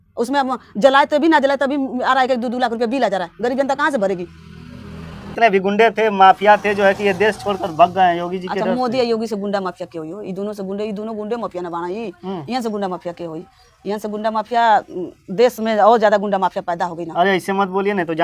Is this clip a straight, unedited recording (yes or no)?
no